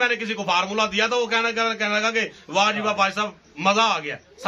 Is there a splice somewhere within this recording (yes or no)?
no